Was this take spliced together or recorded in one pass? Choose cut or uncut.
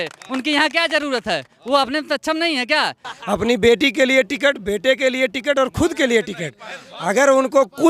cut